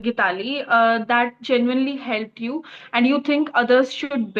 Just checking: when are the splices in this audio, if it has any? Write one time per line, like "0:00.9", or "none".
none